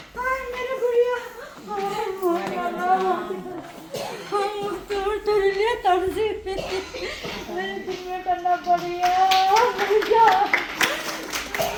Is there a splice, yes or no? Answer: no